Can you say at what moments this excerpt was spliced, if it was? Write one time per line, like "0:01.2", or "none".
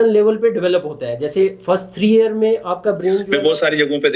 0:03.3